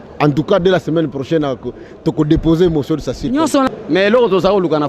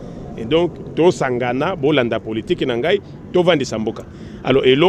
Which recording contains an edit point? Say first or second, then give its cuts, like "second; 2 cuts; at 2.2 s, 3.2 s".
first; 1 cut; at 3.7 s